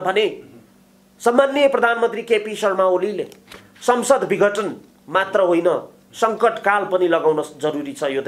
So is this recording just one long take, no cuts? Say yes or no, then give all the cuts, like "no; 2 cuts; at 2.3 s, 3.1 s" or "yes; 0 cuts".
yes; 0 cuts